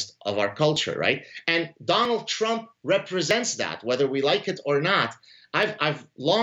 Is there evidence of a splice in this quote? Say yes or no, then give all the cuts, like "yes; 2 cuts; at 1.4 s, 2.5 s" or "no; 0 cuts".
no; 0 cuts